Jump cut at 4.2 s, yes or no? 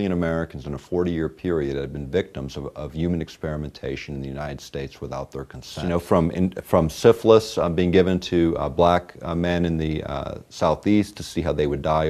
yes